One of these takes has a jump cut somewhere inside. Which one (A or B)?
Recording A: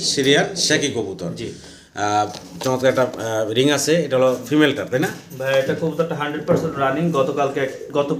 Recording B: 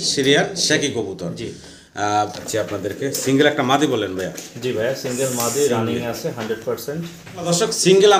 B